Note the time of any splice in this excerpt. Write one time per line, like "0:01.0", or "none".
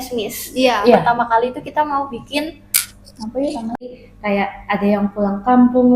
0:03.7